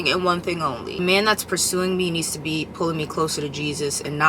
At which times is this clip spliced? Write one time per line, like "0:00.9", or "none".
0:01.0

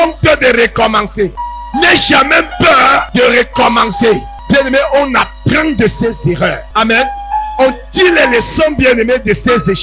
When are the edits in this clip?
0:01.4
0:03.1
0:04.3
0:06.6

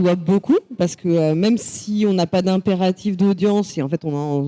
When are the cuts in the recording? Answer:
none

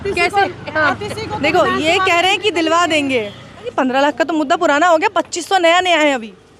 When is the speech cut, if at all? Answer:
0:03.7

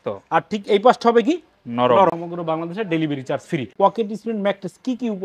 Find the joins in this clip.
0:02.2
0:03.7

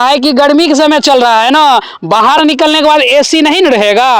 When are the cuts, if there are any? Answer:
none

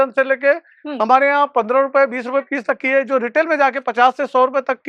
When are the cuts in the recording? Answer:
none

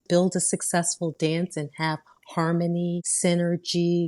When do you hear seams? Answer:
0:03.1

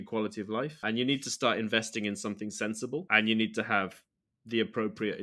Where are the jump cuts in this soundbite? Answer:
0:00.8
0:03.1

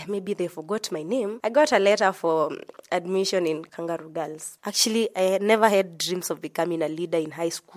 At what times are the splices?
0:01.4
0:04.2

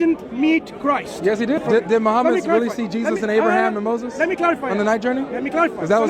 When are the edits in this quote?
0:01.6

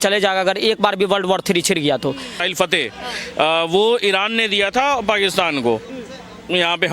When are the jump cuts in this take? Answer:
0:02.5

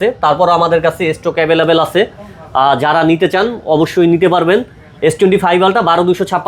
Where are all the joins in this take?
none

